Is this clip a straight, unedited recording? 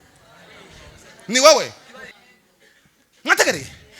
no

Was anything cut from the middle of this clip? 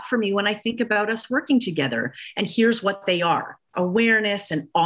yes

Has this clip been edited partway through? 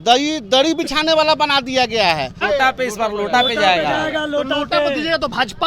yes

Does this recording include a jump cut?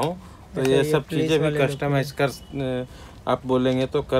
no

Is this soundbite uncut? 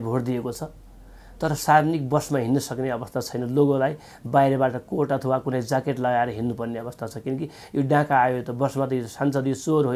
yes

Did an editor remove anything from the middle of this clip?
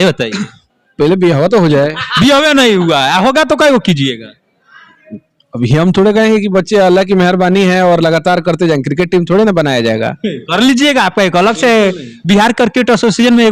no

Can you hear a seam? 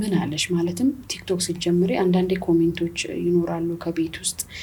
no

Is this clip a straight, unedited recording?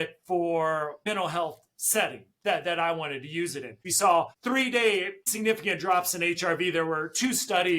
no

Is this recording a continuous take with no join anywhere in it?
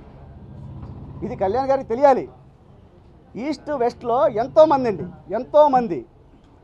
yes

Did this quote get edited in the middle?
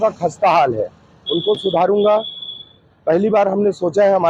no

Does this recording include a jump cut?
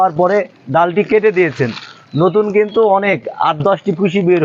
no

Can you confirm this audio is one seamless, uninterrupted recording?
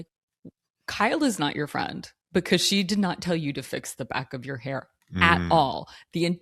yes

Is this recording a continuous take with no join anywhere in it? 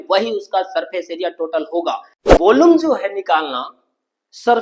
no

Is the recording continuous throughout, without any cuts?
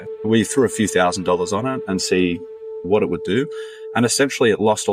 yes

